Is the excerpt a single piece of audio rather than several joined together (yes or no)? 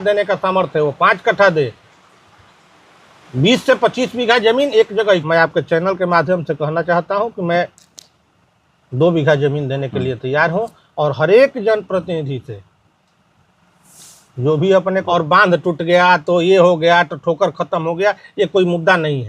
no